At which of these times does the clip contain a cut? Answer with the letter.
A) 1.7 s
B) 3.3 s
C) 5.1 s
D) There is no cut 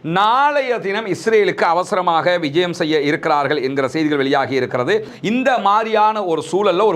C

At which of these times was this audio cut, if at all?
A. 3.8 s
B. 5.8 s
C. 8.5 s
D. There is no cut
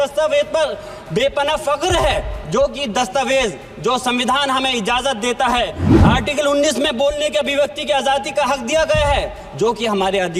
B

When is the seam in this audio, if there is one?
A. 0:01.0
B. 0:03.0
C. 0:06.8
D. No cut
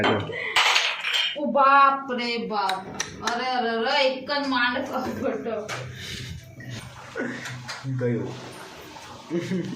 C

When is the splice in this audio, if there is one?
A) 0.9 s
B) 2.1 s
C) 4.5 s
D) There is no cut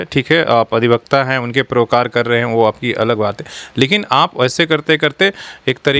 D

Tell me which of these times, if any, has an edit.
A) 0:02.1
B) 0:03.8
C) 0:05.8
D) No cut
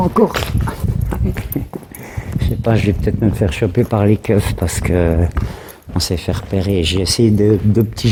D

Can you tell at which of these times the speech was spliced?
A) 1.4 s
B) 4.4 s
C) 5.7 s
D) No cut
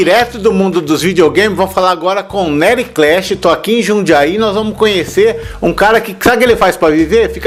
D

